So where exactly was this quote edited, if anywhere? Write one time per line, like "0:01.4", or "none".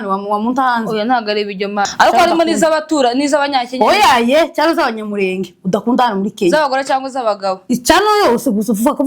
0:01.9